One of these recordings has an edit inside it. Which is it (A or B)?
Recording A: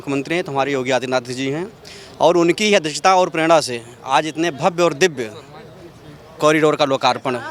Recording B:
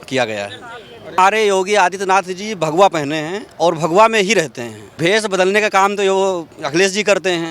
B